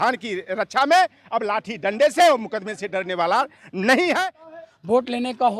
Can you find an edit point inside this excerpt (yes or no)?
yes